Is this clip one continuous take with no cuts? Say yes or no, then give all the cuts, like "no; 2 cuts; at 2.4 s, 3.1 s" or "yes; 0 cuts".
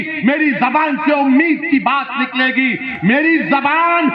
yes; 0 cuts